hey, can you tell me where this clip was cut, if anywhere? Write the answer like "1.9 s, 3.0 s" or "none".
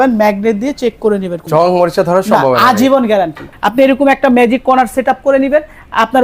1.4 s, 3.4 s